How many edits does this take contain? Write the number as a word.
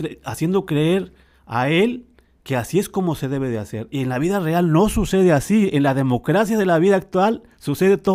zero